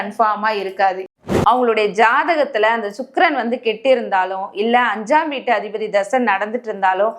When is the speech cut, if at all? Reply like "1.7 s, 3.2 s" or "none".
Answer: 1.1 s